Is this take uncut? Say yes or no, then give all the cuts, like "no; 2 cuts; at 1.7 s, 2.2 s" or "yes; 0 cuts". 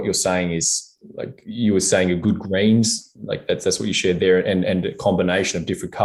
yes; 0 cuts